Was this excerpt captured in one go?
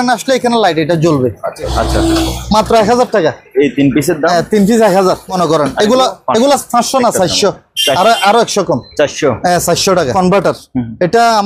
no; 3 cuts; at 1.7 s, 5.3 s, 10.1 s

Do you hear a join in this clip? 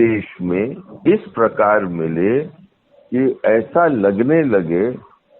yes; 1 cut; at 1.3 s

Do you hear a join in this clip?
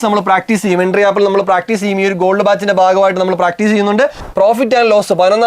yes; 1 cut; at 4.2 s

